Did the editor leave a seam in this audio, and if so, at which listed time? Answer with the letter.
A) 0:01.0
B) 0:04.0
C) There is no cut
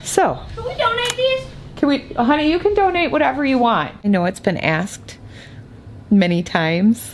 B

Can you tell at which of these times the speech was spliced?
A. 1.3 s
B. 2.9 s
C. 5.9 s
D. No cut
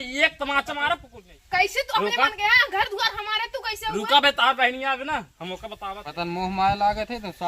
C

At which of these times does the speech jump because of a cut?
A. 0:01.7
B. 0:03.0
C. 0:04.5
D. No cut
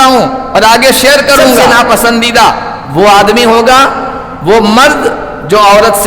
A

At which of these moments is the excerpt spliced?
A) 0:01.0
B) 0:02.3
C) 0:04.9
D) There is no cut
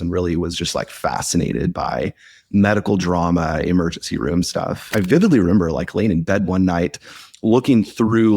C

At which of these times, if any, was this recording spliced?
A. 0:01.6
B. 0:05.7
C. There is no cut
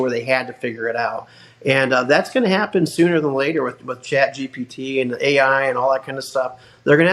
C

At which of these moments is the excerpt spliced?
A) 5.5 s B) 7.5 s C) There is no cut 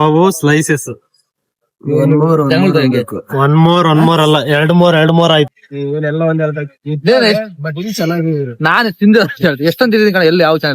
A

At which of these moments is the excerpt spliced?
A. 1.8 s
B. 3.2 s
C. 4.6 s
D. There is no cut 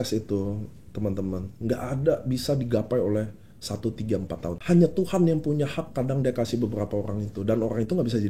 C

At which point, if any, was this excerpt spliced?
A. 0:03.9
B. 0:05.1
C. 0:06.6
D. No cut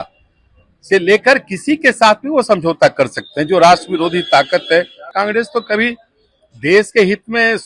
B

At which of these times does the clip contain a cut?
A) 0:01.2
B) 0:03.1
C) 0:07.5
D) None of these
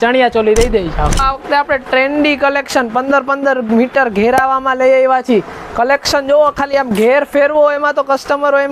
A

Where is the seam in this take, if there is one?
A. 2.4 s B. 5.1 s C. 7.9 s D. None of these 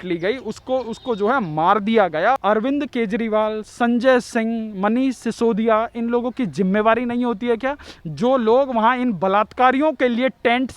A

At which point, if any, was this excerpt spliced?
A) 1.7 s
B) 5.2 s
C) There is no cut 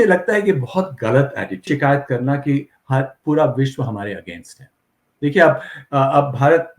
A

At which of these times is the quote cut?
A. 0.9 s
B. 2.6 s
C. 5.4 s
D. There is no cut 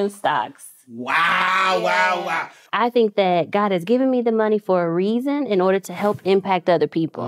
B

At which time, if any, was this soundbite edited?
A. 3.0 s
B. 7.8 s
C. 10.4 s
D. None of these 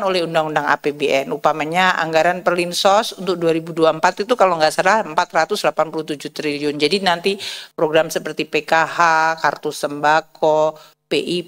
D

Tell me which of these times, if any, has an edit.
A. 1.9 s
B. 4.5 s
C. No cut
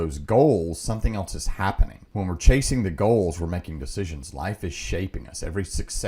A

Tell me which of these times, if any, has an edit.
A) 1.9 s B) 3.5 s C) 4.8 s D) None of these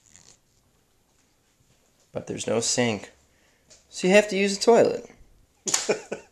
D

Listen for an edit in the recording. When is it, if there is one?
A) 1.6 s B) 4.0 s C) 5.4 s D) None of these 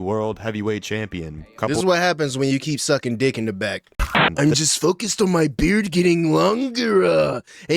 B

